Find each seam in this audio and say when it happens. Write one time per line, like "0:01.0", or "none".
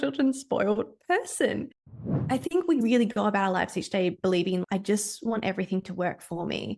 0:02.2